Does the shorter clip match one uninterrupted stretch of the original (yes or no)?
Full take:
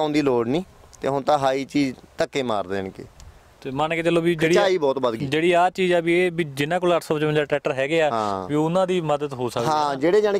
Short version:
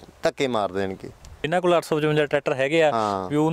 no